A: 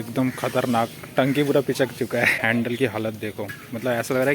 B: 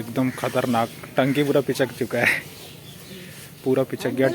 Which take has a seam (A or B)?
A